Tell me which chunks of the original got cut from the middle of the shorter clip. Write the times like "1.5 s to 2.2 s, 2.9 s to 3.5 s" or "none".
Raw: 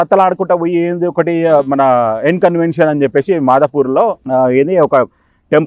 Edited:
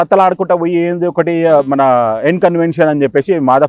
none